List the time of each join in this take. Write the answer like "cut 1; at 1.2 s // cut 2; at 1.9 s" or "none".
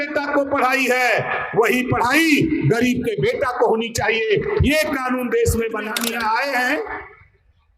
cut 1; at 6.0 s